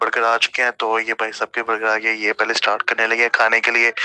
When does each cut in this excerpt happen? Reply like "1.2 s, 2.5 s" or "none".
none